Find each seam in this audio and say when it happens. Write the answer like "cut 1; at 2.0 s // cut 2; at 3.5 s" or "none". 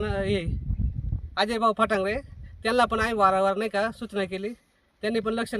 none